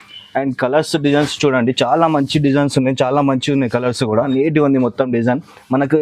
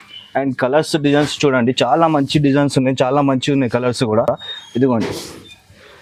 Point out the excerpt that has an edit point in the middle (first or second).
first